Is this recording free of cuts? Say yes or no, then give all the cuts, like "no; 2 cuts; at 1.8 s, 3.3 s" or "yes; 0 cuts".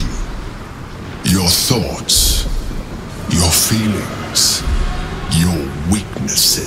yes; 0 cuts